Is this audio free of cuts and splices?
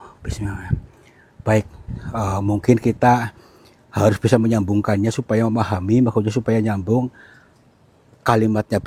yes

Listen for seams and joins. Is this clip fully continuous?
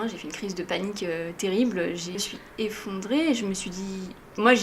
no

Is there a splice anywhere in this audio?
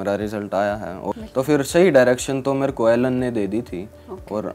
yes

